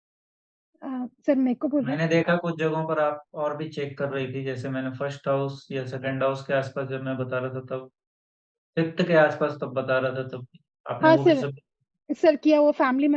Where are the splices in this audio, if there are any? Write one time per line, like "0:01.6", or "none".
none

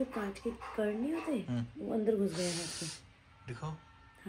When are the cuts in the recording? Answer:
none

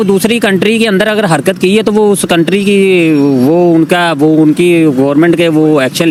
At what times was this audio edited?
none

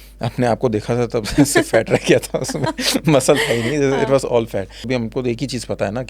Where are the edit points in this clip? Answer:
0:04.9

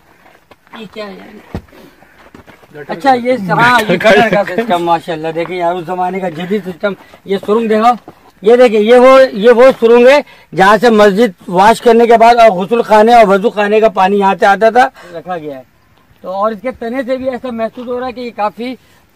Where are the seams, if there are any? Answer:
0:15.1

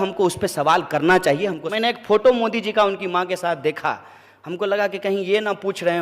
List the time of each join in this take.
0:01.6

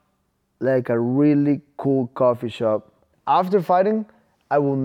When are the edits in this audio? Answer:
0:03.1

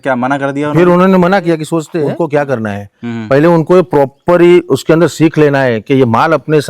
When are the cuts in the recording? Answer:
0:01.9

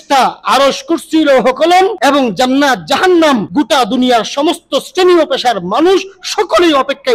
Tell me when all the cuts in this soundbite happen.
0:02.0
0:03.5

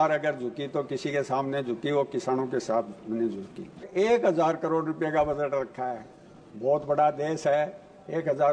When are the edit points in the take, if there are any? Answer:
0:03.9

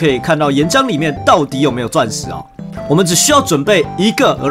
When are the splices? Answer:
none

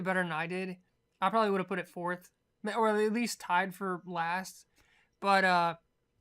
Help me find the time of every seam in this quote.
0:03.4

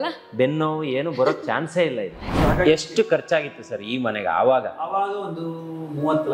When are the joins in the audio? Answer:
0:02.3

